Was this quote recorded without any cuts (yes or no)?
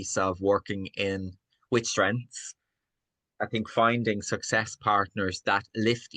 yes